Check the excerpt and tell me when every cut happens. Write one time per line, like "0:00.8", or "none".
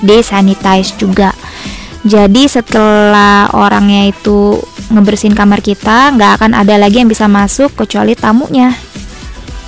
0:08.8

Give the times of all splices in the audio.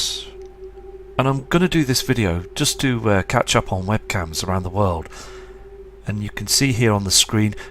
0:05.1

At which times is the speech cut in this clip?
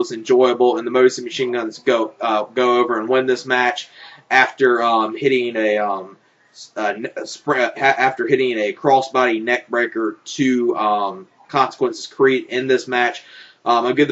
none

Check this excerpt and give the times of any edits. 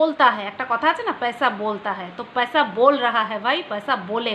none

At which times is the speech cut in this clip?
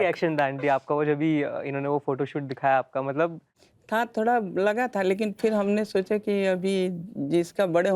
none

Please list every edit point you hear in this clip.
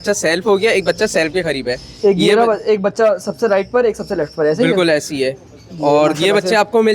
none

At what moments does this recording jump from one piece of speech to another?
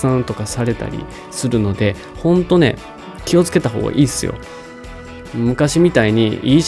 none

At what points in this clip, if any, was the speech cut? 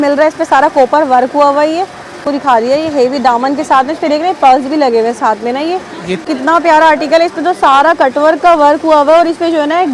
0:02.2
0:06.3

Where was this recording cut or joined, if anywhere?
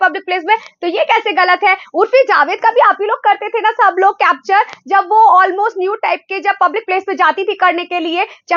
none

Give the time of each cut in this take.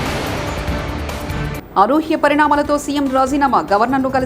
0:01.5

